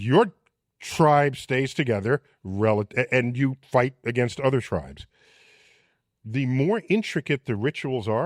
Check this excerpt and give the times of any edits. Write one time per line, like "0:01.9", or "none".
none